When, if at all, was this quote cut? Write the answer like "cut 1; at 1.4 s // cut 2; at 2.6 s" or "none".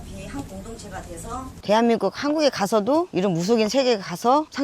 cut 1; at 1.6 s